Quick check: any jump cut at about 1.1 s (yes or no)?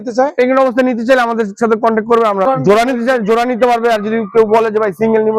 no